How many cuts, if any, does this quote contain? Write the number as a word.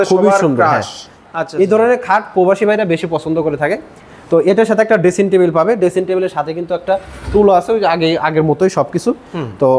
one